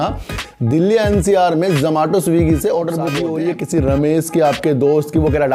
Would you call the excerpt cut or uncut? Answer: cut